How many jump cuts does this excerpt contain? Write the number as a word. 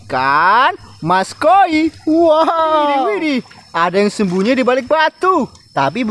one